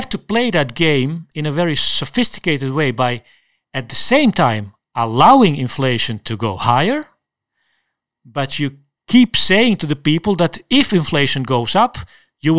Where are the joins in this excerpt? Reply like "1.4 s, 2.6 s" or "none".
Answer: 8.9 s